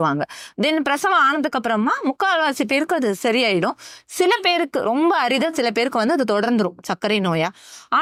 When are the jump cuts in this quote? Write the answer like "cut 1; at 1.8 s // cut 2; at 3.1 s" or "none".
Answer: none